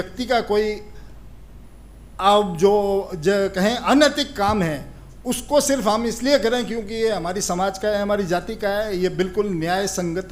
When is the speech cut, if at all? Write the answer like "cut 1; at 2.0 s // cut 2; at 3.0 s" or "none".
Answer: none